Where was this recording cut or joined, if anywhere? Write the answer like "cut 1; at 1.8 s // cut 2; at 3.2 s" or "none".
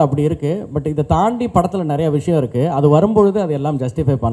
none